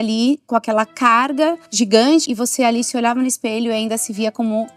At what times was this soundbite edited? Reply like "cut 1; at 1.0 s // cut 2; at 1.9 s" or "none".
cut 1; at 1.7 s // cut 2; at 2.3 s